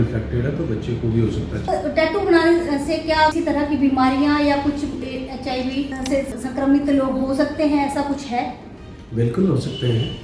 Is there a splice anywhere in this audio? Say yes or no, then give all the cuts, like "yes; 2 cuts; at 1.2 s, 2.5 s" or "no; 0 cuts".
yes; 3 cuts; at 1.7 s, 3.3 s, 6.5 s